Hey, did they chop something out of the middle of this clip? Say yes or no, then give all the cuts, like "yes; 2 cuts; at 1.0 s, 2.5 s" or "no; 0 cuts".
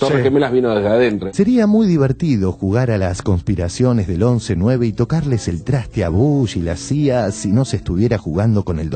yes; 1 cut; at 1.2 s